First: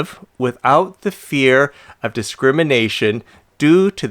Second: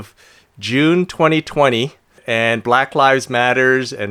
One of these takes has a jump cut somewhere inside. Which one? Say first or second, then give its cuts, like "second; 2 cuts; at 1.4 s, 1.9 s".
second; 1 cut; at 2.1 s